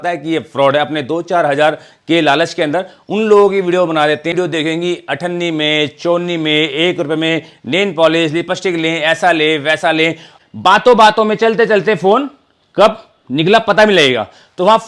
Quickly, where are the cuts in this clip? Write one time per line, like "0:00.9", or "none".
0:04.3
0:10.3